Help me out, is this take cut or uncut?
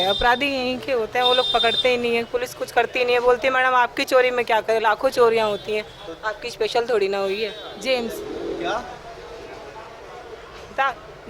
cut